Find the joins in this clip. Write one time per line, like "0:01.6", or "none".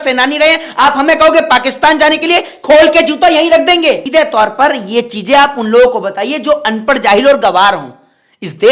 0:04.0